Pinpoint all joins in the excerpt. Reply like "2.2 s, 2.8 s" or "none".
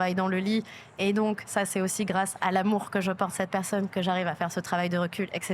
none